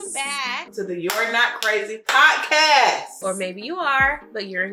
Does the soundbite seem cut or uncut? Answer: uncut